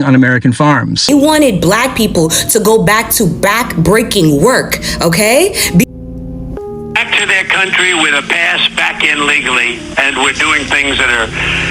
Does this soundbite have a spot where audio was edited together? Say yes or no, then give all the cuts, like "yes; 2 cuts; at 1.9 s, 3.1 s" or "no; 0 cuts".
yes; 2 cuts; at 1.1 s, 5.8 s